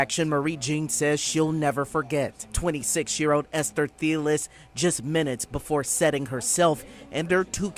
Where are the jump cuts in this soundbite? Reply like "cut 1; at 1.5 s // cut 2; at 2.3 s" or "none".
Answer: none